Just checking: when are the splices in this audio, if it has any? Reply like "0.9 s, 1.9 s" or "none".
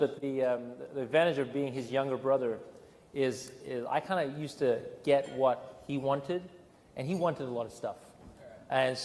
none

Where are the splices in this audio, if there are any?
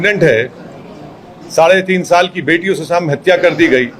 none

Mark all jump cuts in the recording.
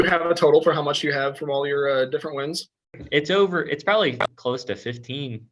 2.9 s

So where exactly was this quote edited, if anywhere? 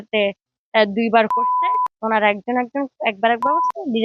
none

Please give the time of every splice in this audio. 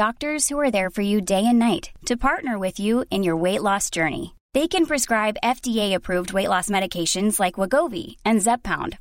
none

